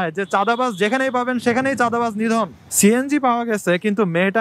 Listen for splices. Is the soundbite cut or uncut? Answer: cut